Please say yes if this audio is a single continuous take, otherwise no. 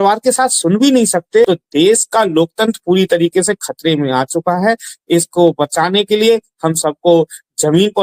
no